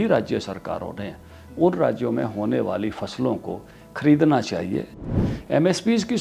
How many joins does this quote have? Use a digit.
1